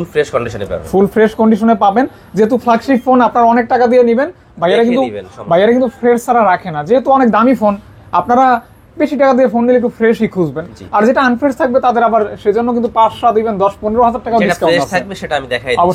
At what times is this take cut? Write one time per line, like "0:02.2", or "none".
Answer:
none